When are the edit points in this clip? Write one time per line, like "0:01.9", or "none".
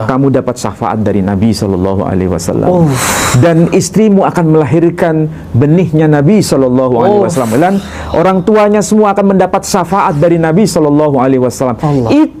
none